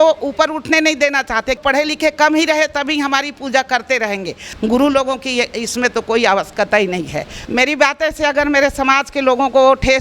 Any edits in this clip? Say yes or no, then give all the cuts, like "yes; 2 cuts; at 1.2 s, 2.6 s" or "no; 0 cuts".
yes; 3 cuts; at 1.6 s, 4.4 s, 7.3 s